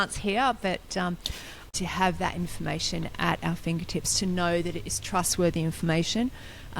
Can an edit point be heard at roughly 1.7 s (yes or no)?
yes